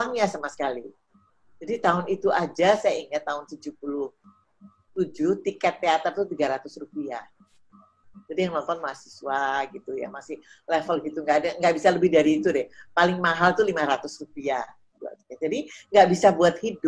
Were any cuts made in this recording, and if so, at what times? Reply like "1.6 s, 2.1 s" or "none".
none